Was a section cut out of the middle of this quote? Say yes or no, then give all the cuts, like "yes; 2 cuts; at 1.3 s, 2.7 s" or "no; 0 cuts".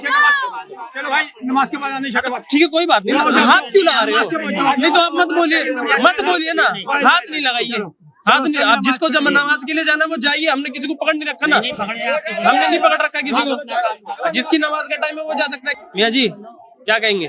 yes; 1 cut; at 15.6 s